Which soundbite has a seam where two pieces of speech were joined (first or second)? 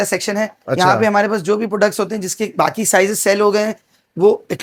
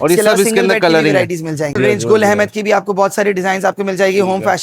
second